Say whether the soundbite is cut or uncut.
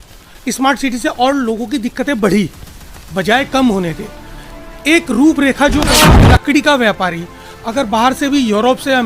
cut